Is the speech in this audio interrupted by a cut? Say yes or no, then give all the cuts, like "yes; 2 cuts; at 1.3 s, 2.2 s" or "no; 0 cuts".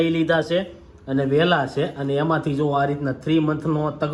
no; 0 cuts